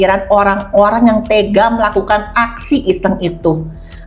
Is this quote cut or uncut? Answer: uncut